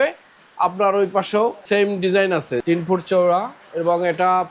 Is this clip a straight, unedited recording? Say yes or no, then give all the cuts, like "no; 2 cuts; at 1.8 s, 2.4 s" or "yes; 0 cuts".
no; 2 cuts; at 1.6 s, 2.6 s